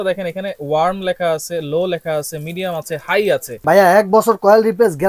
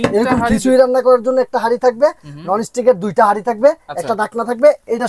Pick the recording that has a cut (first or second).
first